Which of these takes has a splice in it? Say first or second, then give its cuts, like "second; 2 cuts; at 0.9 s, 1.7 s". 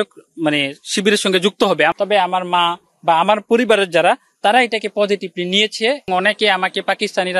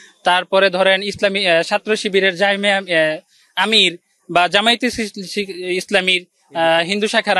first; 2 cuts; at 1.9 s, 6.1 s